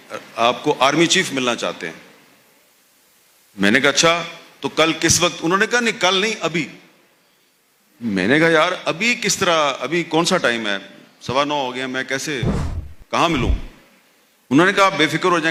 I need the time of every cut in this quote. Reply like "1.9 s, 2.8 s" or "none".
none